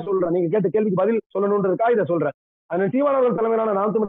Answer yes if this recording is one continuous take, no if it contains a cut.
yes